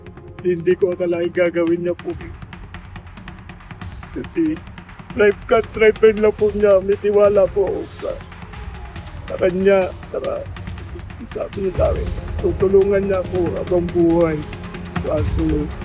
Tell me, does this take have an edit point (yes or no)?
no